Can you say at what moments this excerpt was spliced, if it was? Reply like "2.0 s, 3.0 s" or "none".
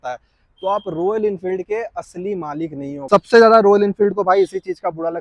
3.1 s

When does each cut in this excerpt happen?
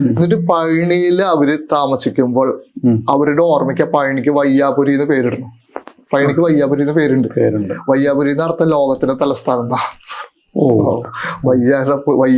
none

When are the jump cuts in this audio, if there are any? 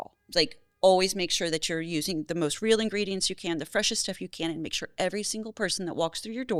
none

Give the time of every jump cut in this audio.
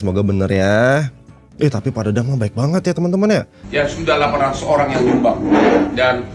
3.6 s

